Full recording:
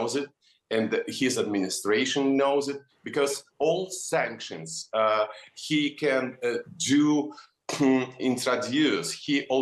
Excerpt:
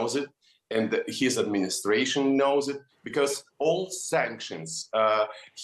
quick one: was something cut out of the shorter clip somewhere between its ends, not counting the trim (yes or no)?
no